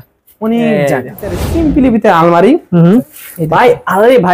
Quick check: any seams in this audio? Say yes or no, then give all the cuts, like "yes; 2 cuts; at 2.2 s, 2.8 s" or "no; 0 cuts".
yes; 2 cuts; at 1.5 s, 3.1 s